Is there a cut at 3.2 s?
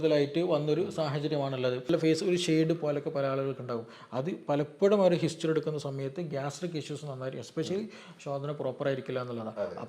no; 1 cut; at 1.9 s

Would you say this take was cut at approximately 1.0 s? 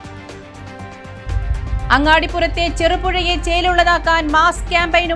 no; 0 cuts

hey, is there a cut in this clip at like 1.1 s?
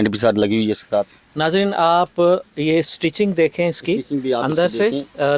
no; 0 cuts

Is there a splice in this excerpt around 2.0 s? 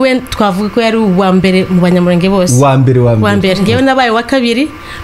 no; 1 cut; at 3.6 s

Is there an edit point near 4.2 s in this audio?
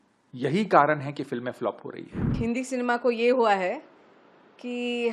no; 1 cut; at 2.3 s

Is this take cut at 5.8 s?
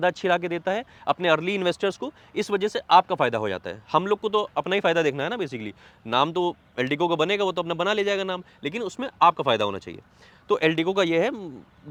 no; 0 cuts

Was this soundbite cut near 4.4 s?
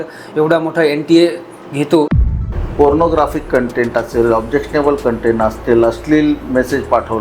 no; 1 cut; at 2.2 s

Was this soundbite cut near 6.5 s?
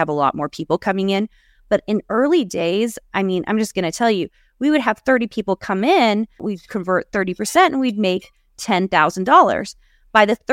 yes; 1 cut; at 6.5 s

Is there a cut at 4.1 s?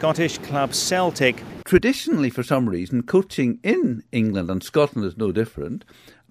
no; 1 cut; at 1.5 s

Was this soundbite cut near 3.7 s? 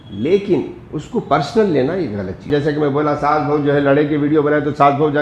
no; 1 cut; at 2.5 s

